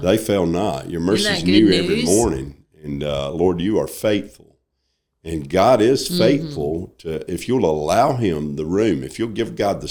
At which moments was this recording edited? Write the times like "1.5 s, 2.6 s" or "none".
none